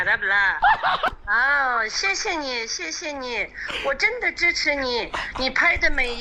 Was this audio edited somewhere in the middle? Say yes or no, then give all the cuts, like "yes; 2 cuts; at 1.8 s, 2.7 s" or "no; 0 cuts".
yes; 1 cut; at 1.1 s